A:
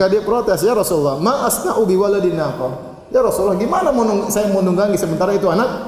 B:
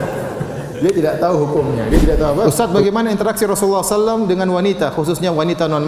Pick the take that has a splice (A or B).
B